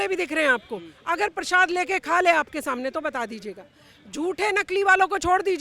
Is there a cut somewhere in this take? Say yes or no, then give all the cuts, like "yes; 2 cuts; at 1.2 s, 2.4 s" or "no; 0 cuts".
no; 0 cuts